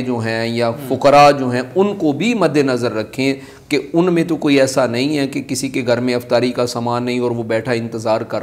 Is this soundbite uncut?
yes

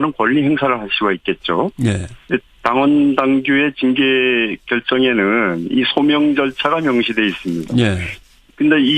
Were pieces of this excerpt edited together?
yes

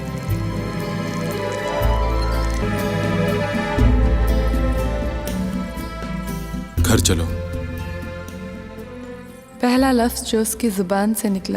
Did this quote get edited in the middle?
yes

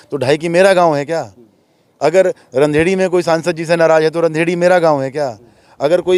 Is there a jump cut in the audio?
no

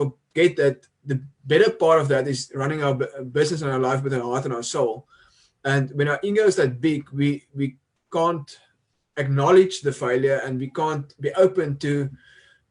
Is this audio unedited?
yes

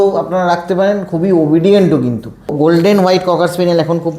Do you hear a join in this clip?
yes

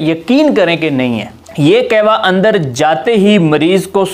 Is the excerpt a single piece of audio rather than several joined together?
no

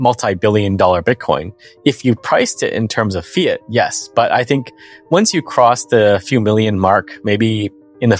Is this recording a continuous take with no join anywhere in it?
yes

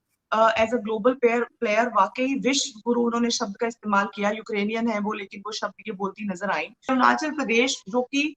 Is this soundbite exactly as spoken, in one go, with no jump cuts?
no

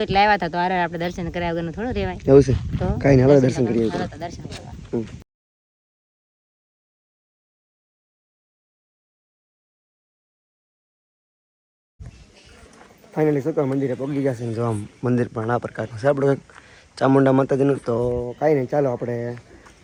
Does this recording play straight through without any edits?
yes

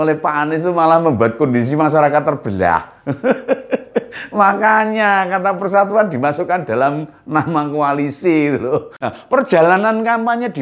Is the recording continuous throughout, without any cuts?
no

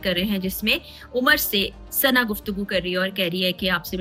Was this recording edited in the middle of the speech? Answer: no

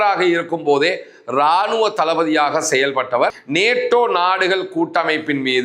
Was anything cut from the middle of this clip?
yes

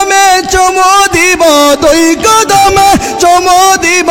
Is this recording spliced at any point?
no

